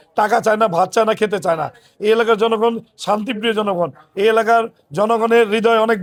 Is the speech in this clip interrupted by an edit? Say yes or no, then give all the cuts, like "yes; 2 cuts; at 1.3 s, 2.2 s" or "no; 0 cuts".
no; 0 cuts